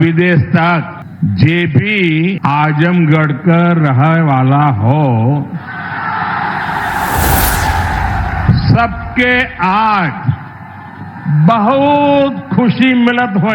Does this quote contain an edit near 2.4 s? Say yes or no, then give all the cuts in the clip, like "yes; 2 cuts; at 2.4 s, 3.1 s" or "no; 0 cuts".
yes; 2 cuts; at 1.0 s, 2.4 s